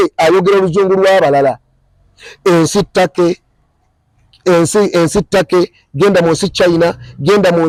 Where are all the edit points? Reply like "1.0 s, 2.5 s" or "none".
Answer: none